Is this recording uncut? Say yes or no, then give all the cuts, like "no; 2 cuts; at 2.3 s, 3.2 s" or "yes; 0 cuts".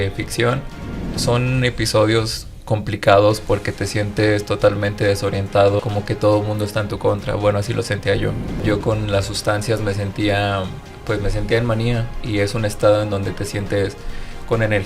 no; 3 cuts; at 1.1 s, 5.8 s, 8.6 s